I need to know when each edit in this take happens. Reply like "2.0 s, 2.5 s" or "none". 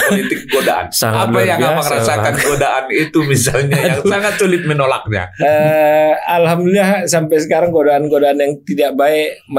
none